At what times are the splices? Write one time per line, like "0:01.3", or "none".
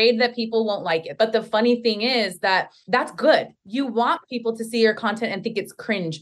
0:01.1
0:02.8
0:03.6